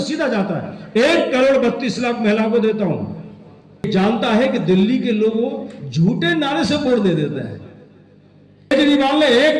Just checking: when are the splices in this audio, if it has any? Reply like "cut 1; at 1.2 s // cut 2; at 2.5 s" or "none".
cut 1; at 3.9 s // cut 2; at 8.7 s